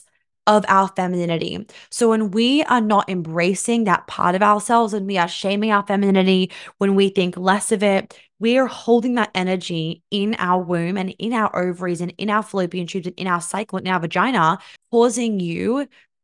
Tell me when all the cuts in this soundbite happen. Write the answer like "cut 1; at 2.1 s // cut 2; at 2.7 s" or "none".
cut 1; at 14.7 s